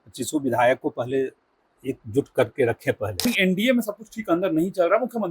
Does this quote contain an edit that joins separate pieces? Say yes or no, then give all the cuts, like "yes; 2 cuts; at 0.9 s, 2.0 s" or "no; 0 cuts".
yes; 1 cut; at 3.2 s